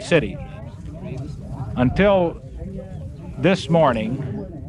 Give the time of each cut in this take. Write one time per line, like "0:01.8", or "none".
none